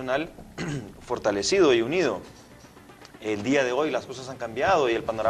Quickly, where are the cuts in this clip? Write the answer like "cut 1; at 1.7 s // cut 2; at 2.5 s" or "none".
cut 1; at 1.3 s

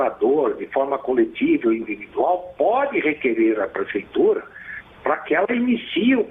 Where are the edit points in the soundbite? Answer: none

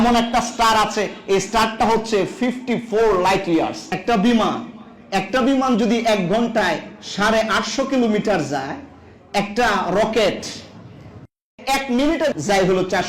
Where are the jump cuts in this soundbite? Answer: cut 1; at 3.8 s

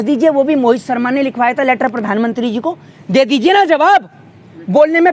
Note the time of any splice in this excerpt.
none

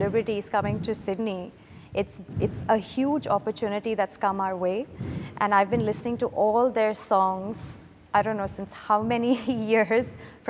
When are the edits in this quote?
none

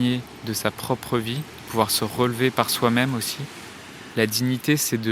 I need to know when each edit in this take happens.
cut 1; at 4.0 s

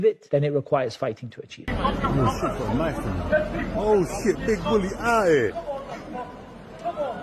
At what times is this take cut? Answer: cut 1; at 1.7 s

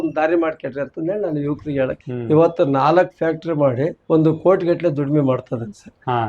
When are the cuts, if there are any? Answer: cut 1; at 2.1 s // cut 2; at 4.0 s

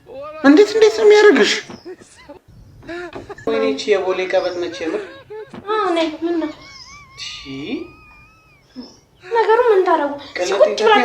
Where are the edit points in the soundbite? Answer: cut 1; at 3.5 s

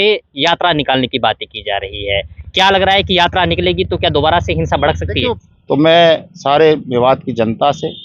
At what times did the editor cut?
cut 1; at 5.4 s

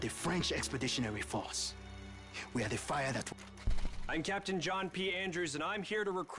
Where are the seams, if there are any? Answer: cut 1; at 3.3 s // cut 2; at 4.9 s

